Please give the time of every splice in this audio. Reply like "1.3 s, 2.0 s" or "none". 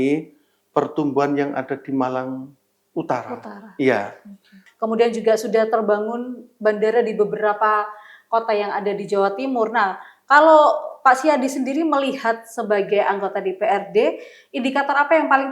4.6 s